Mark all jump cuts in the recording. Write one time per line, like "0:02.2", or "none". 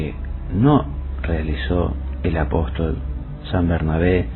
0:01.1